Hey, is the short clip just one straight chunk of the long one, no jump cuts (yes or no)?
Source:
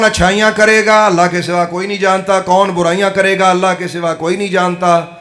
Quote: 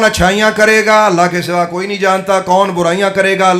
yes